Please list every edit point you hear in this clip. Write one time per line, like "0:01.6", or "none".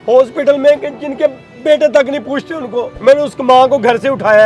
0:02.9